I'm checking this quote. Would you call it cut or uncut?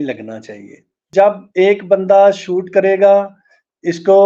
cut